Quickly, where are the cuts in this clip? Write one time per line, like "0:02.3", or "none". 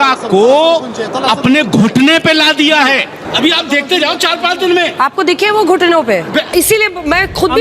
0:03.2
0:06.5